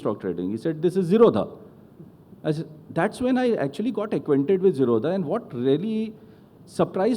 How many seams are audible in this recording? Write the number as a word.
zero